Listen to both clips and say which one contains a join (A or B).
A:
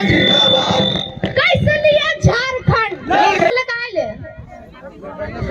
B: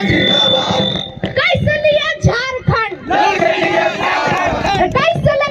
A